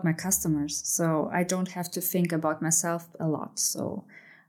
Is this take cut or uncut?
uncut